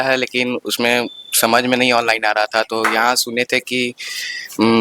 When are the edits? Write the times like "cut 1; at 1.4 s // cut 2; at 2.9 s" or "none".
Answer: none